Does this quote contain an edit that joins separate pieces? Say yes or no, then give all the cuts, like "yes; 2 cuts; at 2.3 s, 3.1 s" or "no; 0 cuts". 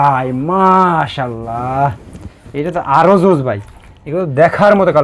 no; 0 cuts